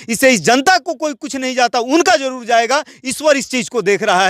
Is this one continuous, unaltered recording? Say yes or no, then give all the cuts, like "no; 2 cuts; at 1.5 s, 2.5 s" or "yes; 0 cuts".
yes; 0 cuts